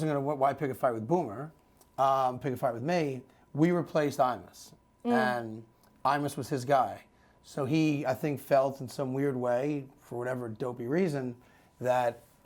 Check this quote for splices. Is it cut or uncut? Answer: uncut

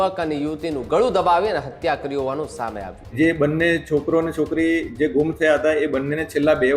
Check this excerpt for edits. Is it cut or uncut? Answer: cut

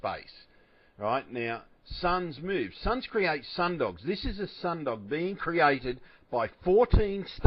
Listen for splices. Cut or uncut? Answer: uncut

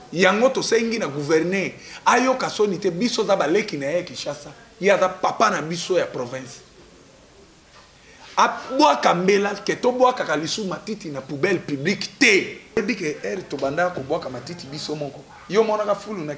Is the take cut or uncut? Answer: cut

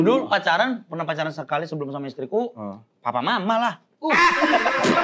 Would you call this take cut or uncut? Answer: uncut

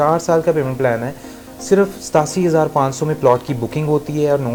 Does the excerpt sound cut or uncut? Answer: uncut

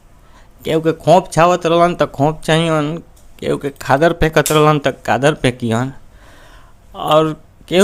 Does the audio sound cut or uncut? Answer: uncut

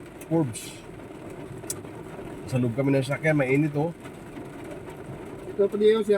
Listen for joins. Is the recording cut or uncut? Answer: uncut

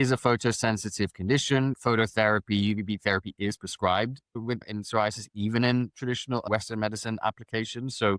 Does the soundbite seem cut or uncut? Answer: cut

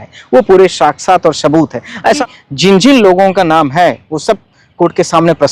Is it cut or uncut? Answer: cut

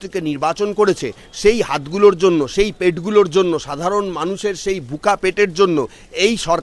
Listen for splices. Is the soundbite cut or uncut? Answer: uncut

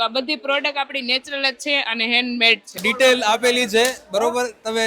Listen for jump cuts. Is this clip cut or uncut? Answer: cut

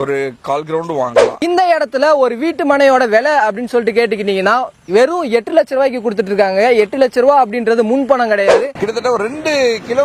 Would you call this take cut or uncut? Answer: cut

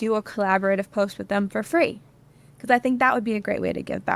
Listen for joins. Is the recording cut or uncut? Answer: uncut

